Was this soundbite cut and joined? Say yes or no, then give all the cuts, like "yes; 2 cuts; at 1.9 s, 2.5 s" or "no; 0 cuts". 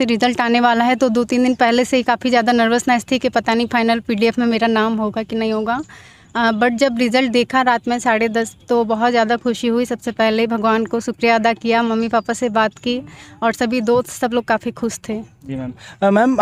no; 0 cuts